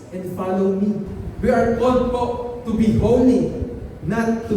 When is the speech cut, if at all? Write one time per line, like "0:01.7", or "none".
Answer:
0:01.2